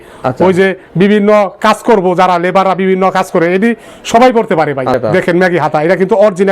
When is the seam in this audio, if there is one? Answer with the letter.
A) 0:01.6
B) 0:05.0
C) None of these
B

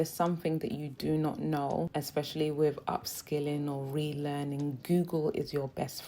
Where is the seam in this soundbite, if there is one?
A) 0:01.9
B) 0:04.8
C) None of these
A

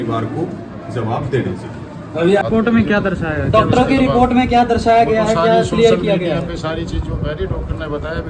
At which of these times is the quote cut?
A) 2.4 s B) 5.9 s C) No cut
A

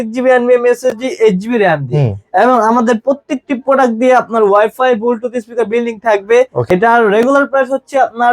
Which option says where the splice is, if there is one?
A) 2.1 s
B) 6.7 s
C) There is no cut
B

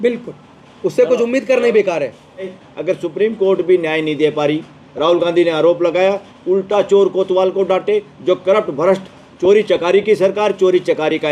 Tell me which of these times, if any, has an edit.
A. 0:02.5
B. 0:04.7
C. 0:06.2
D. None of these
A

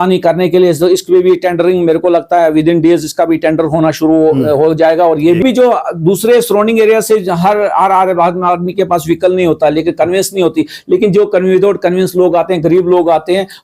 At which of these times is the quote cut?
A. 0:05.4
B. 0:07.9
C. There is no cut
A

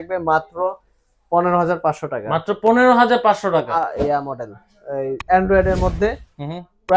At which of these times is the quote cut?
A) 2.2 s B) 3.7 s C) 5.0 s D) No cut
B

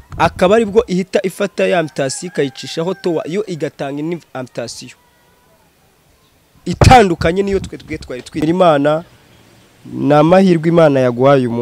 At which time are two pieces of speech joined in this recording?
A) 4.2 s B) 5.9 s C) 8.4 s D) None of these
C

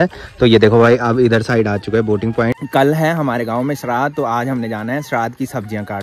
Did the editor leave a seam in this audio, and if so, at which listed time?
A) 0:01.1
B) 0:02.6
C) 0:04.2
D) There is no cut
B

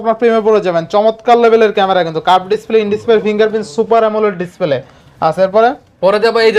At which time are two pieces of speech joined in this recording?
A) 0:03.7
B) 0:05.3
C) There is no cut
C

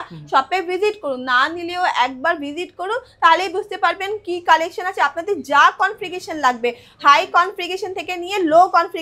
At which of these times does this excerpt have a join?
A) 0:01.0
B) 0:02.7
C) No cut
C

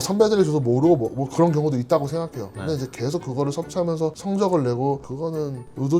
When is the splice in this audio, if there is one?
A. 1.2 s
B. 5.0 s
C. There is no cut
B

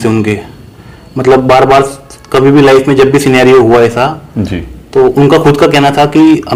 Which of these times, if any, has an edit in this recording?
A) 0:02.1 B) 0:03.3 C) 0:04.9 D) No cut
D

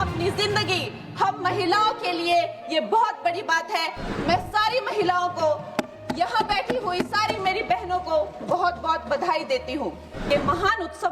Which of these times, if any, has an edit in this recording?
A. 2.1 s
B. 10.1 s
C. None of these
B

